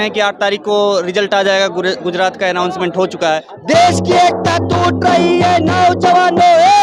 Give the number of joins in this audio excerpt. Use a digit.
1